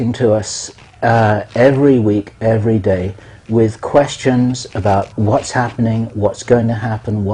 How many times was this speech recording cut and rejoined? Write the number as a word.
one